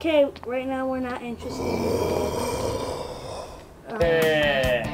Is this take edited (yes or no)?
no